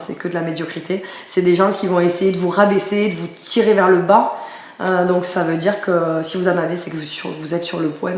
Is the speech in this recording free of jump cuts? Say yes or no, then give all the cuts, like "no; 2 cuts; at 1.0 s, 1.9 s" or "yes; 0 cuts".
yes; 0 cuts